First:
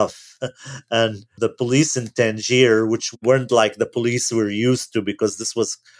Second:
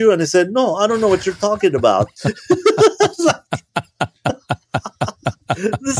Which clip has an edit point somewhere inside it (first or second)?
first